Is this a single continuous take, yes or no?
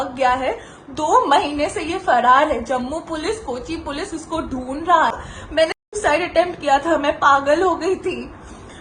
no